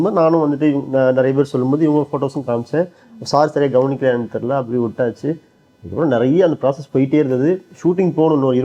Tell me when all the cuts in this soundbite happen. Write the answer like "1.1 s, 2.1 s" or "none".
none